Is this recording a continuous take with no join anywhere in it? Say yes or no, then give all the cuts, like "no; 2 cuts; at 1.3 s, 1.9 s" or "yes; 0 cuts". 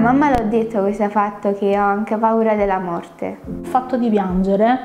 no; 1 cut; at 3.7 s